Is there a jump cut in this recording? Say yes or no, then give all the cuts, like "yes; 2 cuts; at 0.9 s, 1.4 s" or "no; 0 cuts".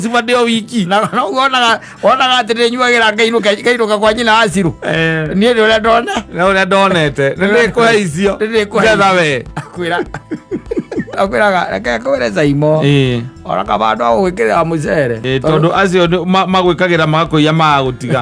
yes; 2 cuts; at 11.2 s, 15.2 s